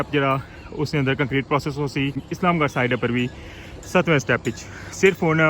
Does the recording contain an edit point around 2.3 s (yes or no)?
yes